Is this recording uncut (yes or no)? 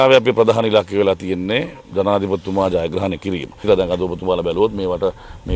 no